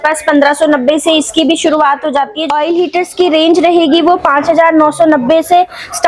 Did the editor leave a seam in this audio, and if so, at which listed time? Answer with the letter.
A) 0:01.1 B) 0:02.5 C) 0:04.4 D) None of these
B